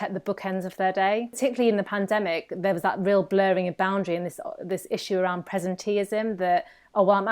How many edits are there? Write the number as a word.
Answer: one